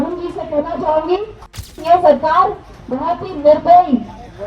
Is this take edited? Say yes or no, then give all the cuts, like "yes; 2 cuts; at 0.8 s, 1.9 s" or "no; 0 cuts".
yes; 1 cut; at 1.8 s